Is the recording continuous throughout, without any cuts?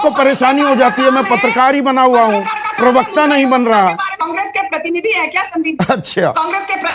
no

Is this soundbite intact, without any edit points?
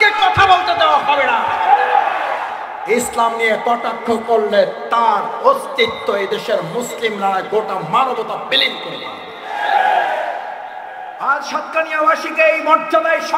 no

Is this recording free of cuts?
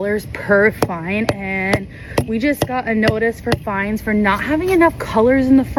yes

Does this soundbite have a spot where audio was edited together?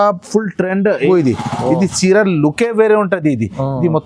yes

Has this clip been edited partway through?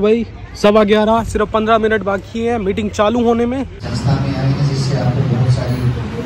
yes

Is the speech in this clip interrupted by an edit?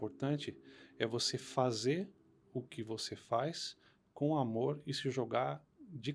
no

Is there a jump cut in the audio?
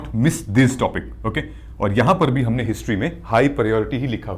no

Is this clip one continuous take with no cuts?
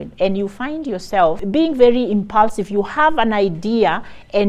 no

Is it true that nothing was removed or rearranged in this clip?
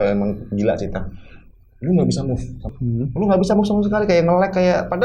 no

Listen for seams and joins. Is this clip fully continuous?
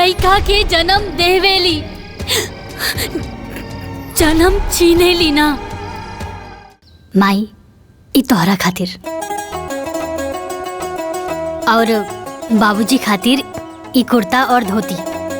no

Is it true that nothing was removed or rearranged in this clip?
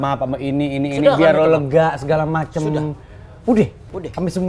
yes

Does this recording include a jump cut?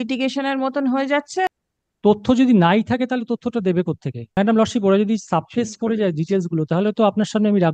yes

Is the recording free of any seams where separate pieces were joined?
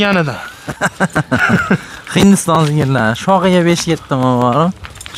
yes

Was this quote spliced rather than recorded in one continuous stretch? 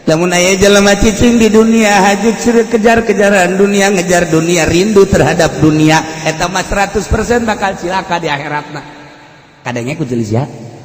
no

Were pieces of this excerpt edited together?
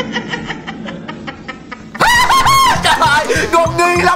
yes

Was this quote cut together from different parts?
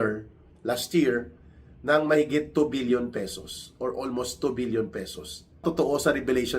yes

